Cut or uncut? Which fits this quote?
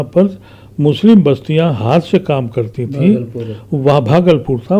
uncut